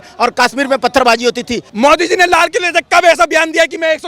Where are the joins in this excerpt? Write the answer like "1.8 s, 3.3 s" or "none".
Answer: 1.6 s